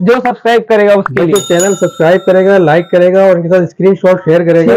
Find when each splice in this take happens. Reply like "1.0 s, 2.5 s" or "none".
none